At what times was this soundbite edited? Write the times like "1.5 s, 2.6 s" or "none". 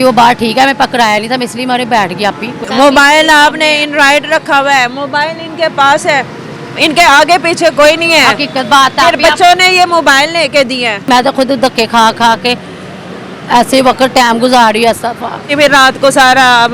2.6 s, 11.1 s, 15.5 s